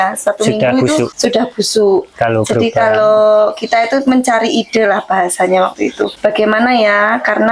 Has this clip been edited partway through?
yes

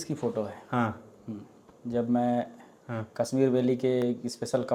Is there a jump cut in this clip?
no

